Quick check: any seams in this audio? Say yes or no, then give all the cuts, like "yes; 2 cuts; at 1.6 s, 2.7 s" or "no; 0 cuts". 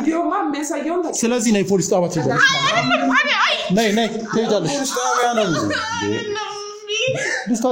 no; 0 cuts